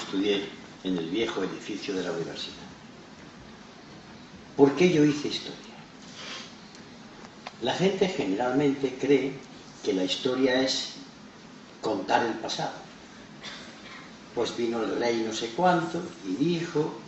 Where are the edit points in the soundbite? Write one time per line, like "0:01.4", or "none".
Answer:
none